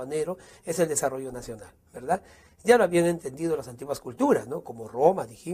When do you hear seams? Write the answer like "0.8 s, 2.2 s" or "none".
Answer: none